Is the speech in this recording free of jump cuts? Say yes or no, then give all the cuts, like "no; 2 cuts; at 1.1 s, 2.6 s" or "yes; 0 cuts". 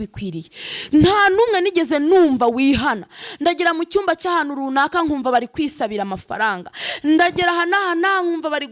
yes; 0 cuts